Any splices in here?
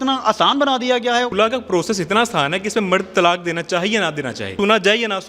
yes; 2 cuts; at 1.3 s, 4.5 s

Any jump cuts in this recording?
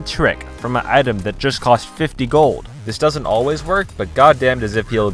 yes; 1 cut; at 2.7 s

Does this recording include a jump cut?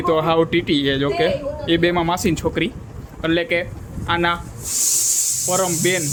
no; 0 cuts

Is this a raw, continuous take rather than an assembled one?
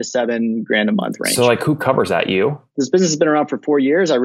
no; 1 cut; at 2.6 s

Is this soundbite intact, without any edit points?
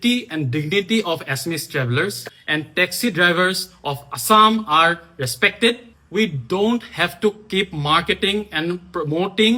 yes; 0 cuts

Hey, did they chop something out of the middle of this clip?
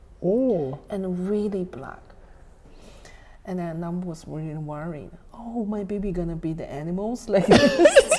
yes; 1 cut; at 2.6 s

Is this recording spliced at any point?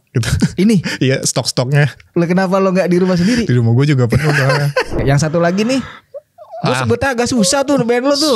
yes; 1 cut; at 5.0 s

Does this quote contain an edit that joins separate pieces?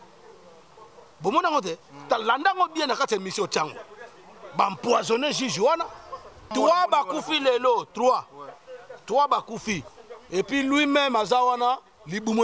yes; 1 cut; at 6.5 s

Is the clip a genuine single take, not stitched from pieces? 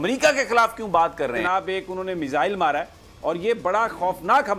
no; 1 cut; at 1.4 s

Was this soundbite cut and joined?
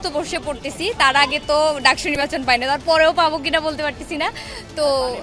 no; 0 cuts

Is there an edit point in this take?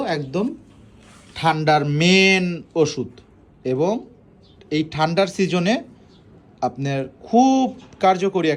no; 0 cuts

